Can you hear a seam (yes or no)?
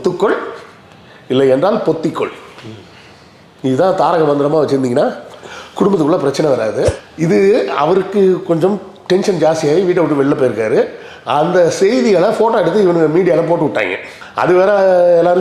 yes